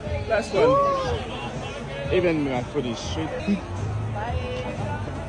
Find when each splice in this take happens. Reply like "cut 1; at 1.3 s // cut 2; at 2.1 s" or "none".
cut 1; at 3.4 s